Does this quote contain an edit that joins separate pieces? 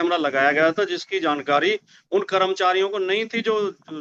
no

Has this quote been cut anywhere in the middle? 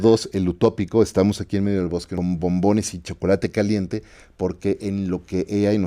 yes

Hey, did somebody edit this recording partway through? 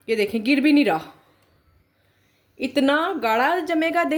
no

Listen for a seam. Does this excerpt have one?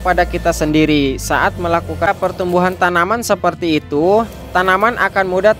yes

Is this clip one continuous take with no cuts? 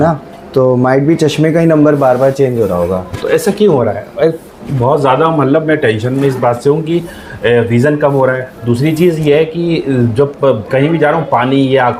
yes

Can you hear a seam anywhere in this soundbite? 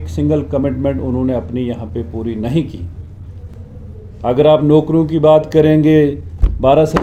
no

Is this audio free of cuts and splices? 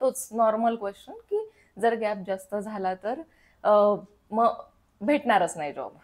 yes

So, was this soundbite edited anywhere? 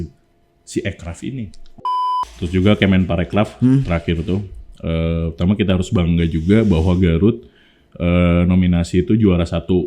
yes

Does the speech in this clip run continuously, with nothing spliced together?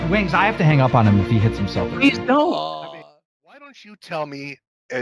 no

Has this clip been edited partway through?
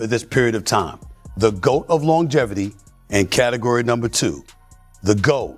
no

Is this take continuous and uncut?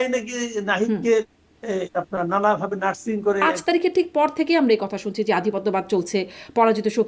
no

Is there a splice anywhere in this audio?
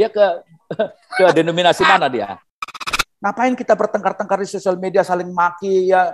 yes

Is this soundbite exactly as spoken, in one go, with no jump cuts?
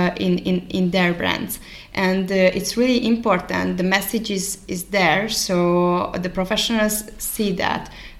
yes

